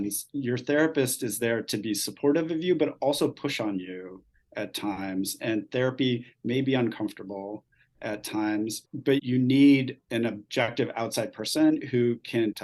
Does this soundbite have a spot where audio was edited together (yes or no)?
yes